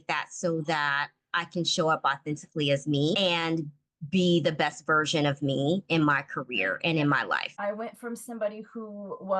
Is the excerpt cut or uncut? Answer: cut